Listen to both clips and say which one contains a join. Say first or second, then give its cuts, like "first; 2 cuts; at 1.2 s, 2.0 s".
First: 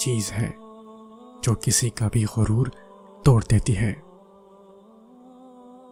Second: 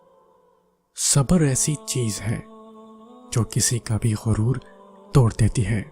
second; 1 cut; at 0.9 s